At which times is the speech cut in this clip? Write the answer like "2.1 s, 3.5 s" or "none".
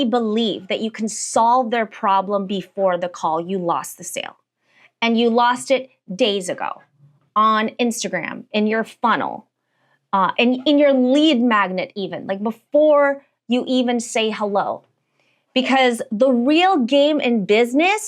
none